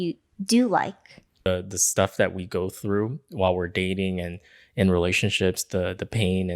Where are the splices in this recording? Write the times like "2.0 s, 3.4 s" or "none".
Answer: 1.5 s